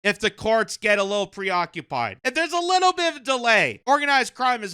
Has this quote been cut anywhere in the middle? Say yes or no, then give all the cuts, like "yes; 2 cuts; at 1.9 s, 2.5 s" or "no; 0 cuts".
yes; 2 cuts; at 2.2 s, 3.8 s